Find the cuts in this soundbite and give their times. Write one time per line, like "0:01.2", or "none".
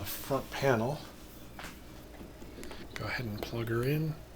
0:02.0